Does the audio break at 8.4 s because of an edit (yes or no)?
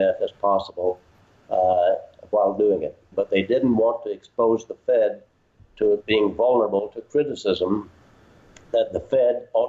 no